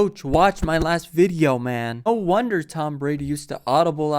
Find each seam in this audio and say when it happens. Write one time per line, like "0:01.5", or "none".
0:01.9

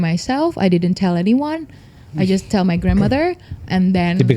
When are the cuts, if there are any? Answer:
none

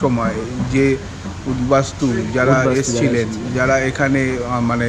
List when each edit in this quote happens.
none

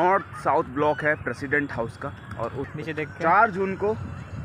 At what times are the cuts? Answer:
0:02.7

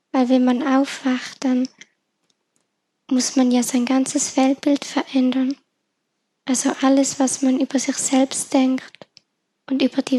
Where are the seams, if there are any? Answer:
none

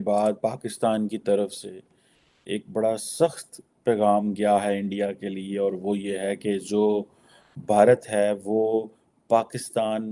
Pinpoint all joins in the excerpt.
none

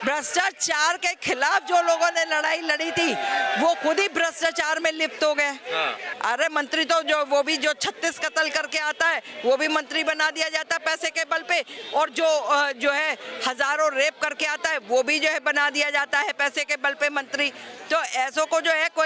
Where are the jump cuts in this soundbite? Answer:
0:06.1

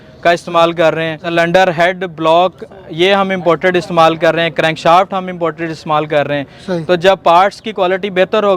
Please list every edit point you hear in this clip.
0:01.3

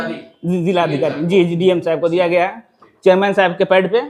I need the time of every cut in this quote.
none

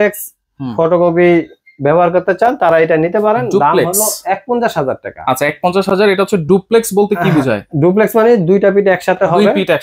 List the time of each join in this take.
none

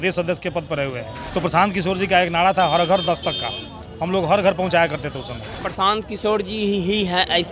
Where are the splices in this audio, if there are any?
0:01.1
0:05.6

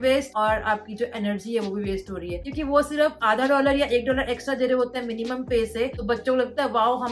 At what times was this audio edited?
none

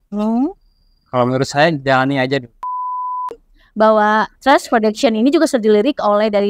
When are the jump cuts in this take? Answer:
0:03.1

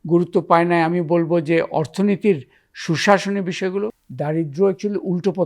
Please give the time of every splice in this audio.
0:04.1

